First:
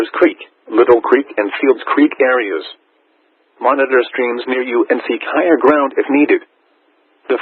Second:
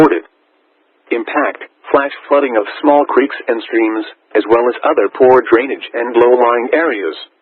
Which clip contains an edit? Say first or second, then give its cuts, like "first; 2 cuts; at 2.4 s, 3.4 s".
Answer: second; 1 cut; at 4.3 s